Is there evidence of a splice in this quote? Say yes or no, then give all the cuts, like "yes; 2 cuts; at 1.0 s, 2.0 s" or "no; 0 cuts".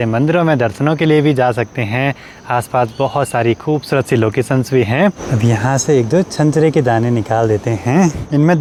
no; 0 cuts